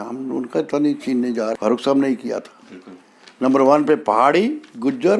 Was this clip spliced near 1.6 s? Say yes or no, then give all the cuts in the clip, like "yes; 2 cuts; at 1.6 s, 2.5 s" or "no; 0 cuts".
yes; 1 cut; at 1.6 s